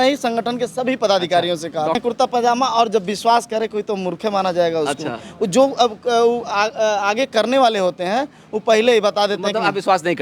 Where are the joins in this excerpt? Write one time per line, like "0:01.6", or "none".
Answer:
0:02.0